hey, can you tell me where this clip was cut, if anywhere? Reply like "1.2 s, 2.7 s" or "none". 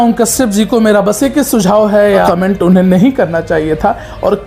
2.3 s